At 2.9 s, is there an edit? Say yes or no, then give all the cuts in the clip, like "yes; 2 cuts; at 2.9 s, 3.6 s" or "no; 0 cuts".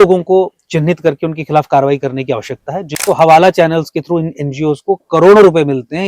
yes; 1 cut; at 2.9 s